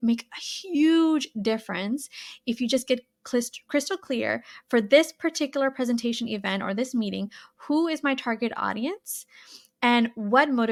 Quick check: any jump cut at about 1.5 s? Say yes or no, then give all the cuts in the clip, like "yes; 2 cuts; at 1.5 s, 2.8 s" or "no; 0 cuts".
no; 0 cuts